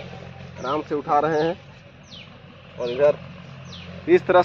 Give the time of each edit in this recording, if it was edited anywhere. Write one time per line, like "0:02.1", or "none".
none